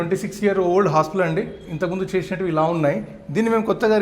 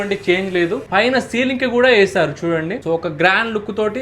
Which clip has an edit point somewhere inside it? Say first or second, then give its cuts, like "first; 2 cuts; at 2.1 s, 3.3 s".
second; 2 cuts; at 0.9 s, 2.8 s